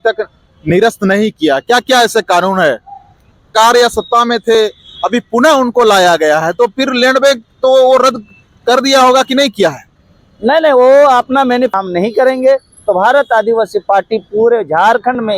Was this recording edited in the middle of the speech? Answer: yes; 2 cuts; at 3.5 s, 11.7 s

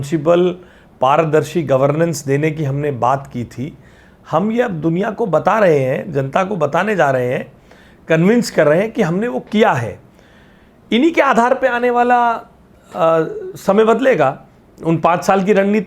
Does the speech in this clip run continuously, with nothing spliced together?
yes; 0 cuts

